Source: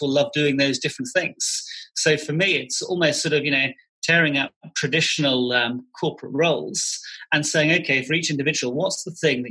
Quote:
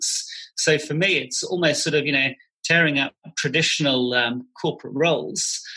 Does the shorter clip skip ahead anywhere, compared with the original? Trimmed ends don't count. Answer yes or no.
no